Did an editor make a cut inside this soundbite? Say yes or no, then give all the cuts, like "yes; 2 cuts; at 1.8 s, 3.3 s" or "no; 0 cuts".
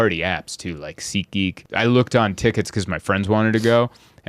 yes; 1 cut; at 1.6 s